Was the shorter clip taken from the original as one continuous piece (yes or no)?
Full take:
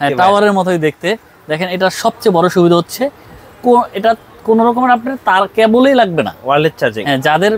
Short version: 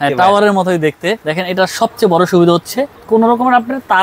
no